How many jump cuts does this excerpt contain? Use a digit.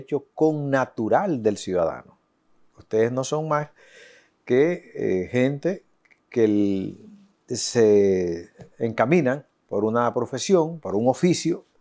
0